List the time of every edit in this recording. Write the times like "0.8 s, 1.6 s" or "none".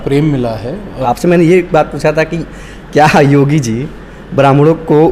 1.0 s